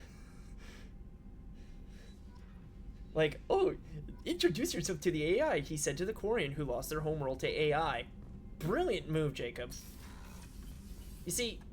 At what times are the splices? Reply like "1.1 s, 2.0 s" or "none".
10.7 s